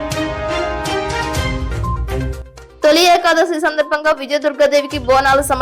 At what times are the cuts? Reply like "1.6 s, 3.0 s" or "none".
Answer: 1.7 s, 2.2 s